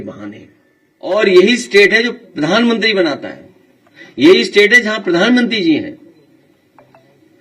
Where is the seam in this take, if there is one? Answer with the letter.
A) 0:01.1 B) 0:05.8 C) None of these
A